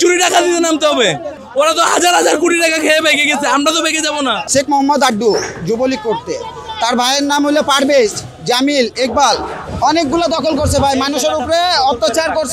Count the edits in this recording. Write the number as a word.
three